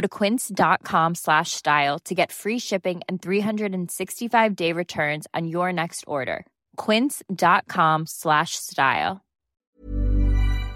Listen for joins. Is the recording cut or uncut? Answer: cut